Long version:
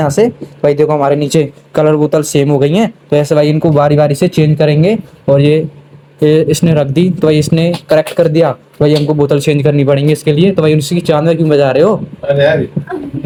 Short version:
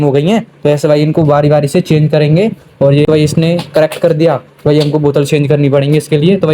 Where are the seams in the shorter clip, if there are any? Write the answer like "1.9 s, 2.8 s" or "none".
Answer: 3.1 s